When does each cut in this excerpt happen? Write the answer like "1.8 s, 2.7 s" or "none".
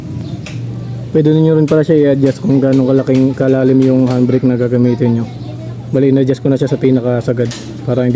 none